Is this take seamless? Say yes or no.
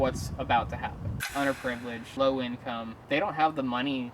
no